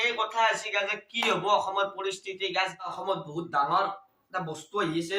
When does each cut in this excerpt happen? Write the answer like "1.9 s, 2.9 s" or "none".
3.0 s